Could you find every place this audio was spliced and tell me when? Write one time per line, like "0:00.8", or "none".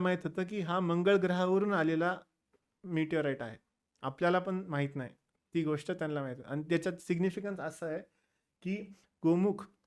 none